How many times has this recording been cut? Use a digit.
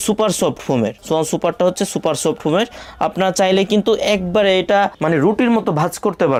0